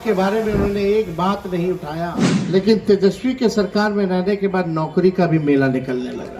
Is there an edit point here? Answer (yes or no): yes